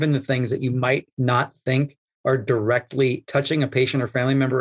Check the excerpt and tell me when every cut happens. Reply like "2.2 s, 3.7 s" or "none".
1.1 s, 3.2 s